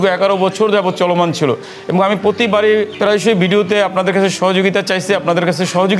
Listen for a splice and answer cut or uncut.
uncut